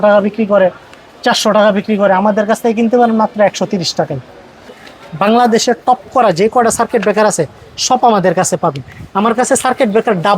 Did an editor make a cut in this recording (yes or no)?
yes